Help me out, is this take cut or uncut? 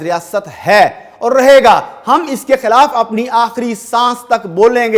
uncut